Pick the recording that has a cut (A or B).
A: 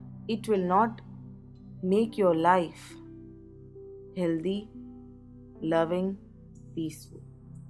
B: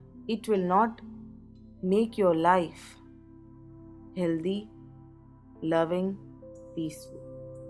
B